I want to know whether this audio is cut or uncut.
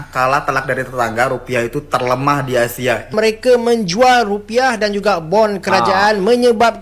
cut